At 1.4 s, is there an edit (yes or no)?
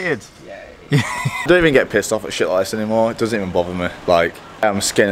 yes